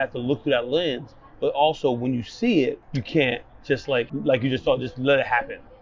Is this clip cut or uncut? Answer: cut